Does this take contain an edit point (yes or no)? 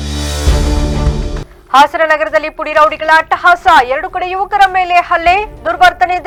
no